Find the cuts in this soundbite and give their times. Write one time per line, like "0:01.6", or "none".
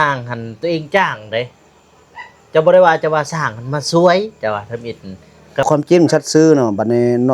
0:05.6